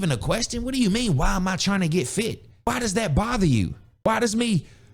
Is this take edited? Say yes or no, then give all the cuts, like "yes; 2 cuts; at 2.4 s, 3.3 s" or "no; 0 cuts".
yes; 2 cuts; at 2.7 s, 3.8 s